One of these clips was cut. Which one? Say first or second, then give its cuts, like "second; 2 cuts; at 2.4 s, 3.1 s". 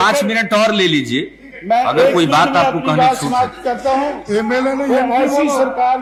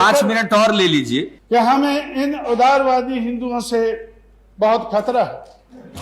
second; 1 cut; at 1.3 s